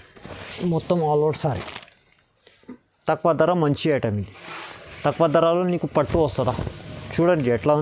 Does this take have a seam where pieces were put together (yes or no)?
no